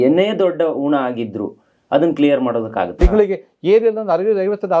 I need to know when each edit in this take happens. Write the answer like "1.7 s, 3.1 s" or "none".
2.9 s